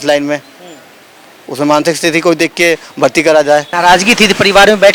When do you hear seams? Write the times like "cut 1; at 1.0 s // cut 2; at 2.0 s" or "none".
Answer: cut 1; at 3.7 s